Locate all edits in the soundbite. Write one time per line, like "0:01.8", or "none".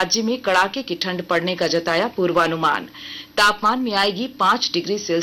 none